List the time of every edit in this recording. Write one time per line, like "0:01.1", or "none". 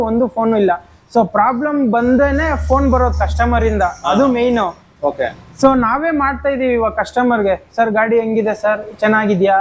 none